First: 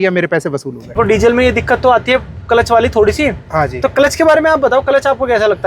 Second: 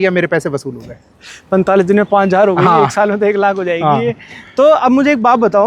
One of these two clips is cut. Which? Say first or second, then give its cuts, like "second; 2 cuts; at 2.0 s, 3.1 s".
first; 1 cut; at 1.0 s